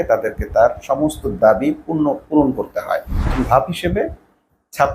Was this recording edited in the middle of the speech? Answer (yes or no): yes